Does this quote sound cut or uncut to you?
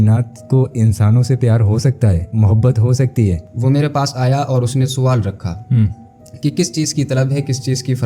cut